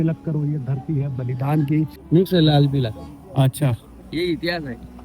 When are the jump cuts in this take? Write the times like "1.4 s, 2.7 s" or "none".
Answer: 2.0 s